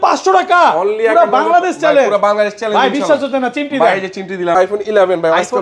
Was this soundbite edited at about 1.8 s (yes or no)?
no